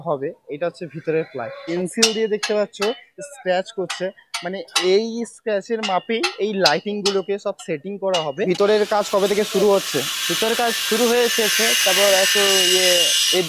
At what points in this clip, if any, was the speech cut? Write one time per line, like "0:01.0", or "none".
0:01.7
0:08.5